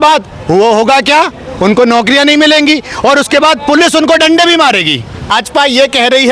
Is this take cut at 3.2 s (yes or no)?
no